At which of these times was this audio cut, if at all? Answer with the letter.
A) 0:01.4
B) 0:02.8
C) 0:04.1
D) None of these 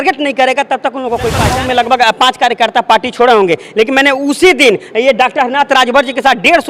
A